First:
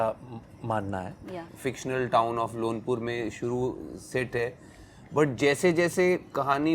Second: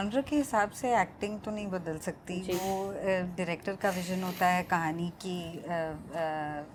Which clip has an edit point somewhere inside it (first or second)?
first